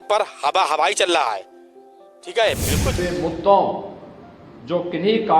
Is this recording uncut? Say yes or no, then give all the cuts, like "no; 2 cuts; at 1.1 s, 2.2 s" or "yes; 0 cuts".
no; 1 cut; at 2.9 s